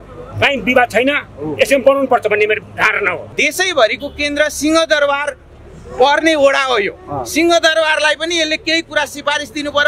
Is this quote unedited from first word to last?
no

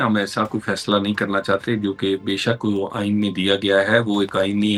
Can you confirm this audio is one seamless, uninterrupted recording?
yes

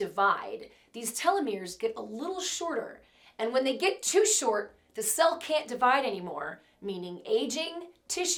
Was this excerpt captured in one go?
yes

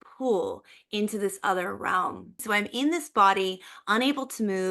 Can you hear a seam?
yes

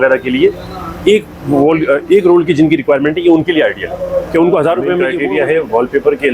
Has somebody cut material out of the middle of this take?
yes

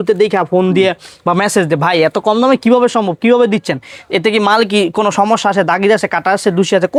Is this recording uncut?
yes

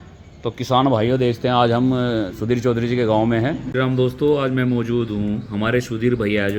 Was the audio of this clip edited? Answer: no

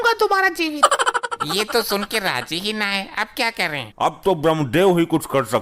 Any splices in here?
no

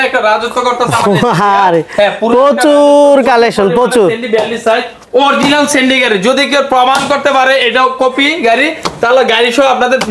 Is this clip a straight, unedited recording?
yes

